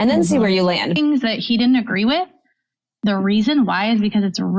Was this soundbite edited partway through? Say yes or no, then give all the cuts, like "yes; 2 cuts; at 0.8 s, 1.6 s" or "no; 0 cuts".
yes; 1 cut; at 0.9 s